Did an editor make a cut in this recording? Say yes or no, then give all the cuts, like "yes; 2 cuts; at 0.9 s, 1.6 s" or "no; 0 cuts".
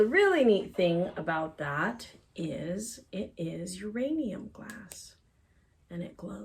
no; 0 cuts